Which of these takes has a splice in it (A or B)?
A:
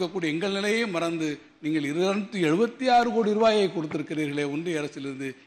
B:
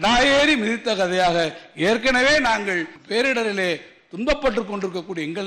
B